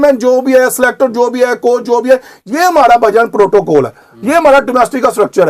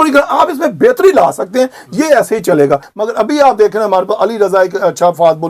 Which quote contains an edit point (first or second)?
second